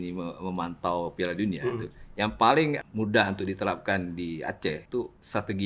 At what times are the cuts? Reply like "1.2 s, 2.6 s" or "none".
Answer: 2.8 s, 4.8 s